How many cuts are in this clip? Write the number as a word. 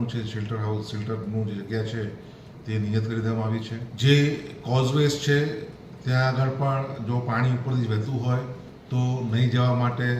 one